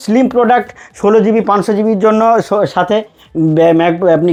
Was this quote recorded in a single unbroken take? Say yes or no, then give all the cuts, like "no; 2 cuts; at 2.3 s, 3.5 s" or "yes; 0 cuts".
yes; 0 cuts